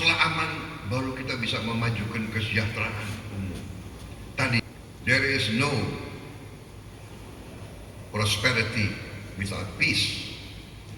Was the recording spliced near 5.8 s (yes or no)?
no